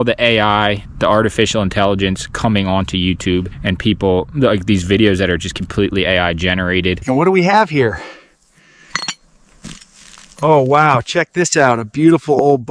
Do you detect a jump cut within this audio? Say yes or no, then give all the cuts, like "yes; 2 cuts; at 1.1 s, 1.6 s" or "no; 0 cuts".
no; 0 cuts